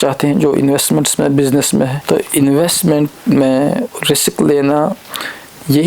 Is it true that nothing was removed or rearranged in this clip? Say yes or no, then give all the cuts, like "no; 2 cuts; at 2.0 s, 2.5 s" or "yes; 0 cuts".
no; 1 cut; at 2.0 s